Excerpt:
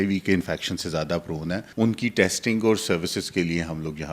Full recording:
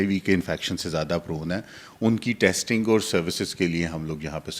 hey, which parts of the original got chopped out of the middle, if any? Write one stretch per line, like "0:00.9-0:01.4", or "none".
0:01.7-0:01.9